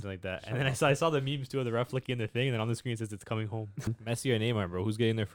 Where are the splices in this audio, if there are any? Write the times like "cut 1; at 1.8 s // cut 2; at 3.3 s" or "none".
cut 1; at 3.9 s

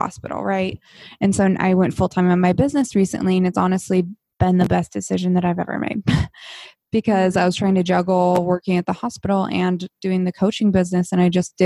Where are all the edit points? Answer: cut 1; at 4.2 s

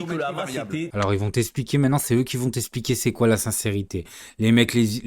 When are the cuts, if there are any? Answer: cut 1; at 0.9 s

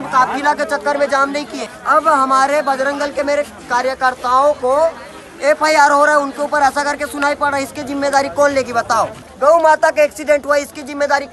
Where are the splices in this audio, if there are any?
cut 1; at 9.2 s

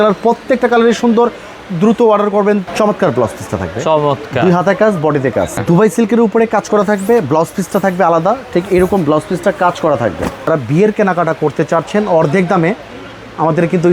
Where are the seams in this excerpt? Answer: cut 1; at 2.7 s // cut 2; at 5.6 s // cut 3; at 10.5 s

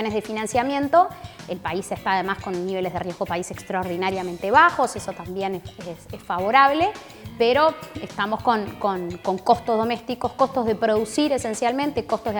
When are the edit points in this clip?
none

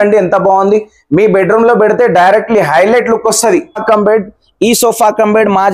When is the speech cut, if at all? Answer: cut 1; at 3.8 s

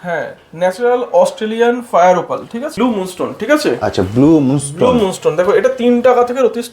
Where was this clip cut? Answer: cut 1; at 2.7 s

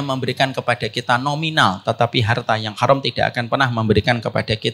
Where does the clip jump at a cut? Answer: none

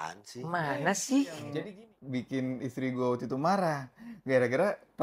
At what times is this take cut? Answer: cut 1; at 1.5 s

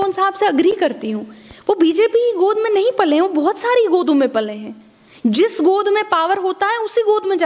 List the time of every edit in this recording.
none

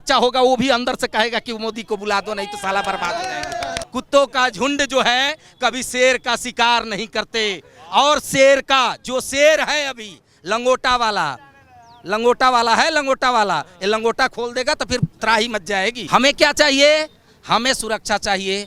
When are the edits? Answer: cut 1; at 3.8 s // cut 2; at 16.0 s

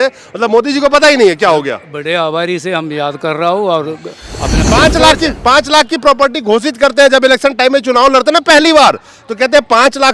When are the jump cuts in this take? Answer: cut 1; at 4.6 s

